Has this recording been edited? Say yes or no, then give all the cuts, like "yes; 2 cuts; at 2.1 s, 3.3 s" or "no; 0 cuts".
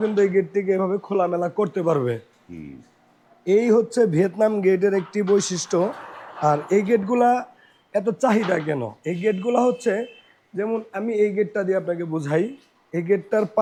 no; 0 cuts